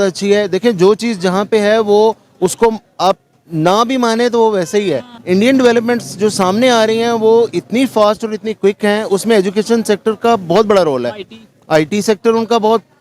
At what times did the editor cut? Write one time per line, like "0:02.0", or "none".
0:05.1